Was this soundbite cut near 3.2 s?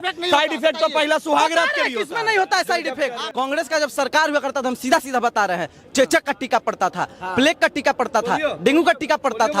yes; 1 cut; at 3.2 s

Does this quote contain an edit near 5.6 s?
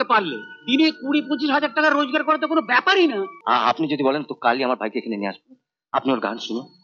no; 1 cut; at 3.3 s

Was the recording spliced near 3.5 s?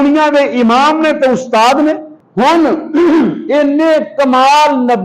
no; 1 cut; at 2.1 s

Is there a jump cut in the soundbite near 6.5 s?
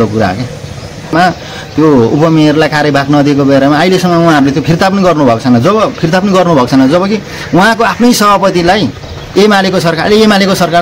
no; 1 cut; at 1.1 s

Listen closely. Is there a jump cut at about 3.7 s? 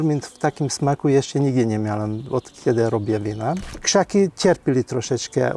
yes; 1 cut; at 3.7 s

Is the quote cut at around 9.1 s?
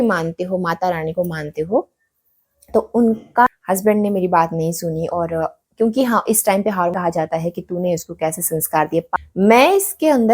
yes; 3 cuts; at 3.5 s, 6.9 s, 9.1 s

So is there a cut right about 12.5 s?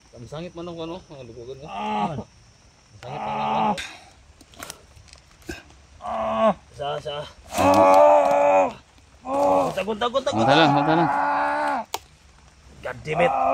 no; 1 cut; at 3.8 s

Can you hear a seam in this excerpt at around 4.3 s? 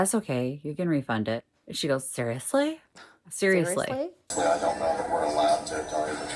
yes; 1 cut; at 4.3 s

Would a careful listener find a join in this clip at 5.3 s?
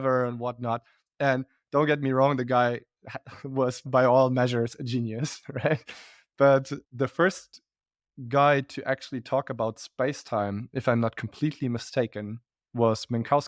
no; 1 cut; at 3.9 s

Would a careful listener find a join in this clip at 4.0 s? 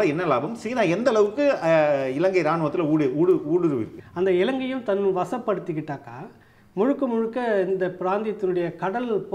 yes; 1 cut; at 4.0 s

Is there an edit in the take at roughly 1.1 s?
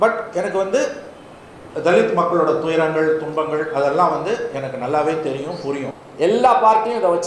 no; 1 cut; at 5.9 s

